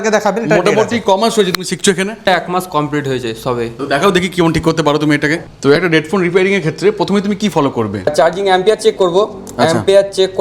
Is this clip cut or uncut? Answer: cut